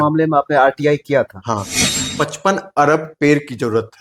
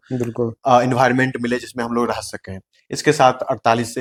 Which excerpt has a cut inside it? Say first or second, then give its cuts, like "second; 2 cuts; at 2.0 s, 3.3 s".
first; 1 cut; at 2.1 s